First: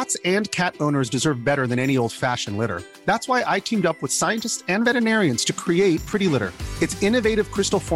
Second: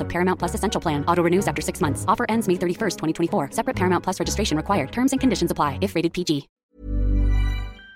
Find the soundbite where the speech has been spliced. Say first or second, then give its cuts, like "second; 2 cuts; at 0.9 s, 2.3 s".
second; 1 cut; at 6.5 s